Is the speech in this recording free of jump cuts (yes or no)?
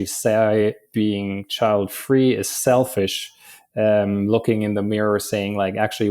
yes